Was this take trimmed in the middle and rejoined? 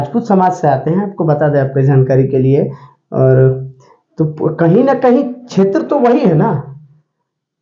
no; 0 cuts

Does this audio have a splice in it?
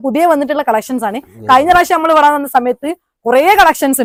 no; 0 cuts

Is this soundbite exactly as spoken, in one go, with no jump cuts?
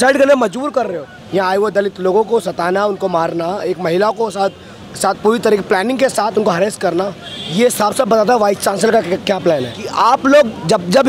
no; 2 cuts; at 1.1 s, 9.8 s

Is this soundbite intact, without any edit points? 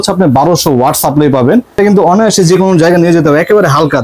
no; 1 cut; at 1.8 s

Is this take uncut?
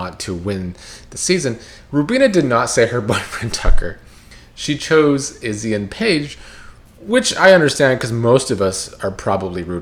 yes; 0 cuts

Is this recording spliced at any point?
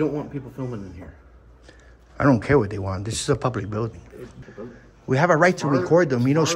yes; 1 cut; at 4.3 s

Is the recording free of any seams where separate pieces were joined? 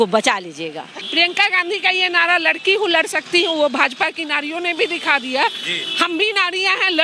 no; 1 cut; at 1.0 s

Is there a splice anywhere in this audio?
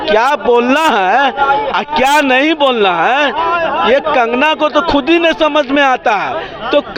no; 0 cuts

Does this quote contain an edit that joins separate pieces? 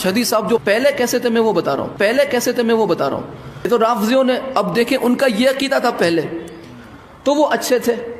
yes; 1 cut; at 3.5 s

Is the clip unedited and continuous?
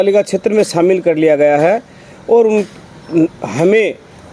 yes; 0 cuts

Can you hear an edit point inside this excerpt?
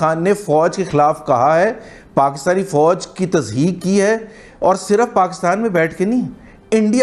no; 0 cuts

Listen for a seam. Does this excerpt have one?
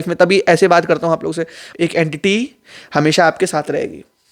yes; 1 cut; at 1.6 s

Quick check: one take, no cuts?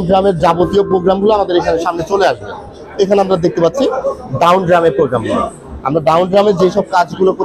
yes; 0 cuts

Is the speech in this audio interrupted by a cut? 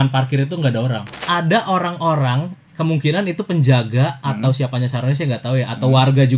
yes; 1 cut; at 1.1 s

